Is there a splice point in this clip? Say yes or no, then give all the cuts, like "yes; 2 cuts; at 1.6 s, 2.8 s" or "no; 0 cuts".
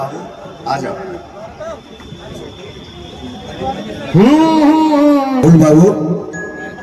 yes; 1 cut; at 5.4 s